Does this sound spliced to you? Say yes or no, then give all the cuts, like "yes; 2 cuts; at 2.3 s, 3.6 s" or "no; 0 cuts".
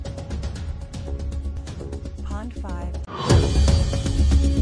yes; 1 cut; at 1.4 s